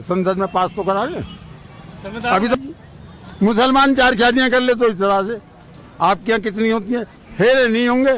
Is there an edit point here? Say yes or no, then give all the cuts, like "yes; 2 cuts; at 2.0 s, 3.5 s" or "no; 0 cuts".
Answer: yes; 1 cut; at 2.5 s